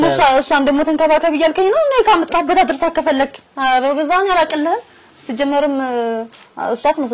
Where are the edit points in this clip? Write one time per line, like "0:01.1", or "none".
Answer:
none